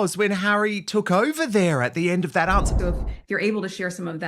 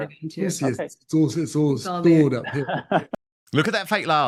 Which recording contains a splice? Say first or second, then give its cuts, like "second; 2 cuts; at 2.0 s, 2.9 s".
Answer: first; 1 cut; at 2.7 s